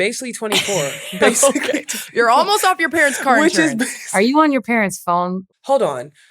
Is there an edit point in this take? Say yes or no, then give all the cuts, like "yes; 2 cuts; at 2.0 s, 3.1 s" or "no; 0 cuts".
yes; 2 cuts; at 4.0 s, 5.4 s